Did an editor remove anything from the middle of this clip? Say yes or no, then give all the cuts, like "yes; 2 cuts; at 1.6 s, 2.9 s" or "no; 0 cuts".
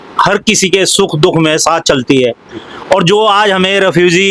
no; 0 cuts